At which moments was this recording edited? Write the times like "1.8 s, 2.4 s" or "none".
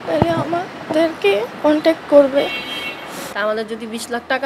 3.3 s

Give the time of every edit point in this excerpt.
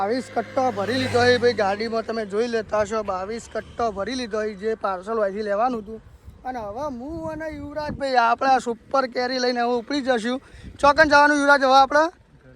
none

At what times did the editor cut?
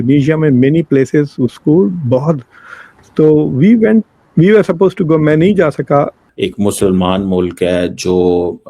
6.2 s

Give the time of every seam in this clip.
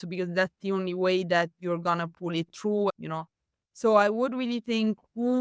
2.9 s

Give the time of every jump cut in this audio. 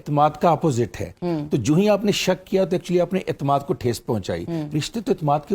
none

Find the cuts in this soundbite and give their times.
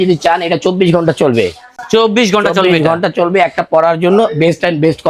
none

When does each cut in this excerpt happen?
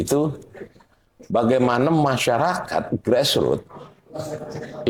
none

